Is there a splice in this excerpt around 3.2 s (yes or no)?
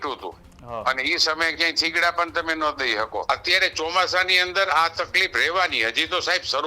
yes